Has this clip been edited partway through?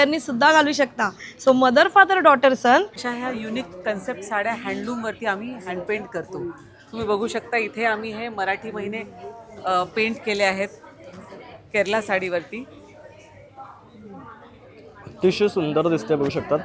yes; 1 cut; at 3.0 s

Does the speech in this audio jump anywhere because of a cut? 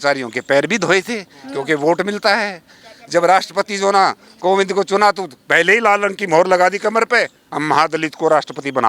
no; 0 cuts

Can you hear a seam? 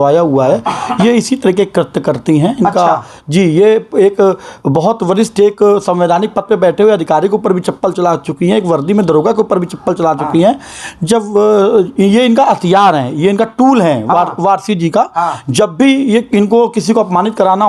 no; 0 cuts

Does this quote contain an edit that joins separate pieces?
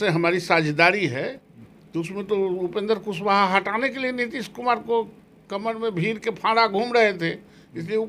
no; 0 cuts

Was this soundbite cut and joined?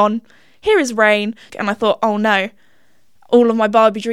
yes; 1 cut; at 1.5 s

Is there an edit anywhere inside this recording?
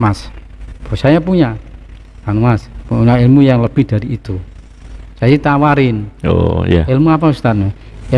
no; 0 cuts

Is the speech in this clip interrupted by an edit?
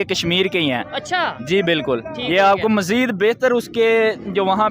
no; 0 cuts

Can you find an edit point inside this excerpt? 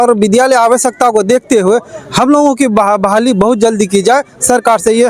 no; 0 cuts

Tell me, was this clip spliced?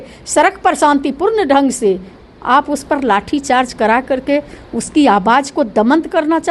yes; 1 cut; at 2.1 s

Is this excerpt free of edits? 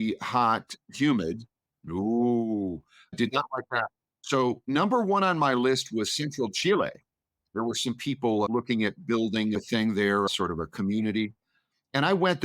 no; 3 cuts; at 8.5 s, 9.5 s, 10.3 s

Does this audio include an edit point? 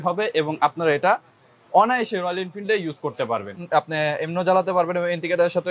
yes; 1 cut; at 3.6 s

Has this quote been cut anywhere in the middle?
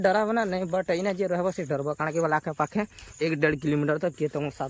no; 0 cuts

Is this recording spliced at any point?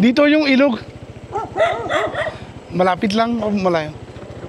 no; 0 cuts

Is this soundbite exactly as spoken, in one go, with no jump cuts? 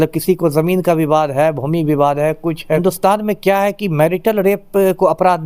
no; 1 cut; at 2.8 s

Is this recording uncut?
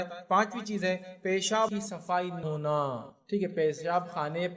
no; 1 cut; at 2.4 s

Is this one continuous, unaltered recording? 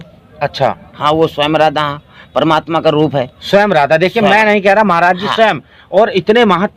yes; 0 cuts

